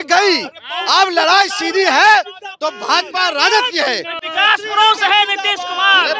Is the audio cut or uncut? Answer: uncut